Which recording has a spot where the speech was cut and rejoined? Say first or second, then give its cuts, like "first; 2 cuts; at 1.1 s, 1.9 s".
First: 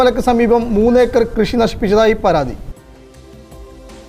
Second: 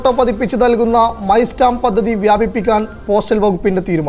first; 1 cut; at 2.7 s